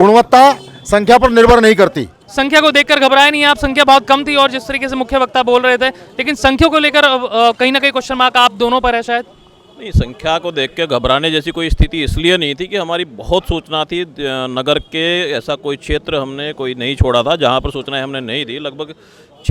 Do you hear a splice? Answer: yes; 1 cut; at 2.2 s

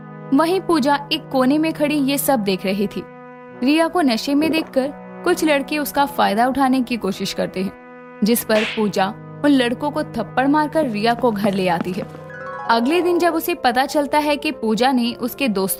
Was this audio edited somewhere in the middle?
no; 0 cuts

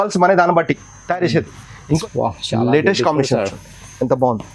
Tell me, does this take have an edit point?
yes; 1 cut; at 2.0 s

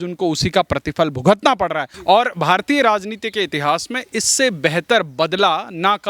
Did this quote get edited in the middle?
yes; 1 cut; at 1.9 s

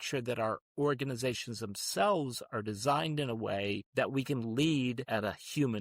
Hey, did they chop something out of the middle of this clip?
yes; 2 cuts; at 3.8 s, 5.0 s

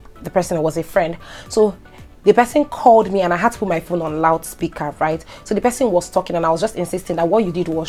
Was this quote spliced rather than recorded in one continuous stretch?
no; 0 cuts

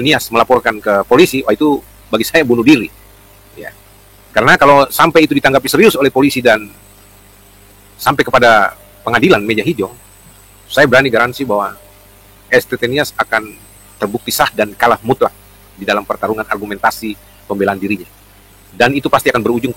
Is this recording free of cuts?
yes; 0 cuts

